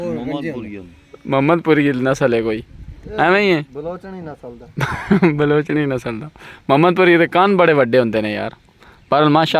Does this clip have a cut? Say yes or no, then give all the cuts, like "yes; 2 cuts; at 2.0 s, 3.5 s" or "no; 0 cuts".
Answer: no; 0 cuts